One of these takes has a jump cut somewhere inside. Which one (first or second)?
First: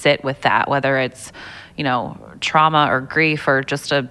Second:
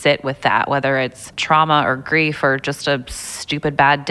second